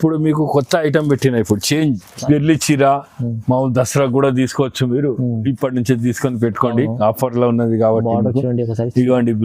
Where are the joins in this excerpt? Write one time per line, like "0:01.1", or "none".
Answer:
0:02.1